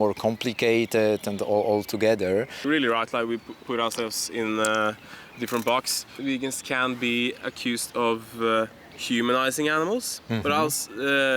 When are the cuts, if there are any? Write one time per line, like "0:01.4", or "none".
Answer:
0:02.6
0:06.1